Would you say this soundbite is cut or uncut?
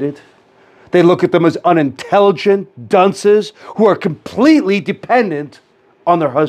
uncut